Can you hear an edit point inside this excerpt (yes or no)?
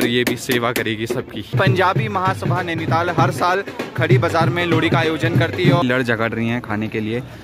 yes